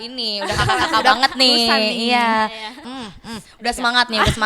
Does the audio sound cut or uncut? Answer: cut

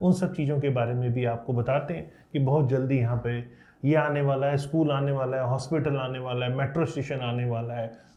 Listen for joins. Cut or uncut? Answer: uncut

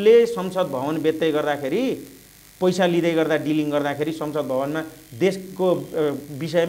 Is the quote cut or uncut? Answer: uncut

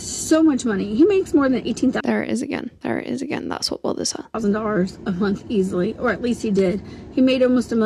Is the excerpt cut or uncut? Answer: uncut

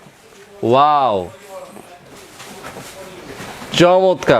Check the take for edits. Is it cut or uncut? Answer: uncut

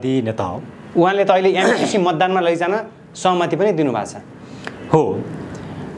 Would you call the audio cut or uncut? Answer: uncut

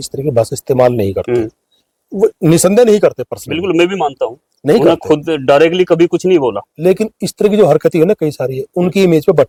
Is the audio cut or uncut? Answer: uncut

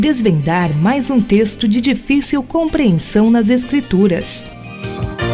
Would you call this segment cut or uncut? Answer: cut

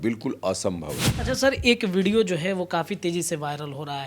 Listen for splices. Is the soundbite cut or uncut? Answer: cut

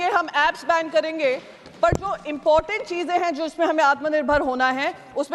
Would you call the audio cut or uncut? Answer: uncut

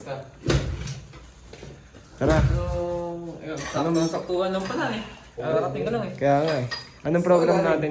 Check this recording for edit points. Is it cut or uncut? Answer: uncut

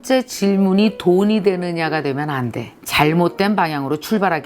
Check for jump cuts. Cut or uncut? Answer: uncut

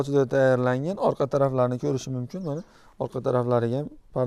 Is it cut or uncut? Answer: uncut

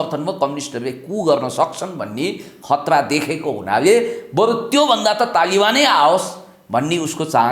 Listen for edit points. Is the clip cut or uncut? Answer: uncut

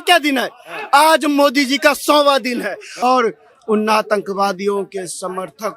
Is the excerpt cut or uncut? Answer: cut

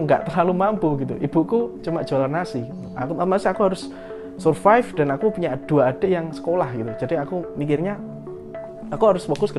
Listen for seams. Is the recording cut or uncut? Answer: uncut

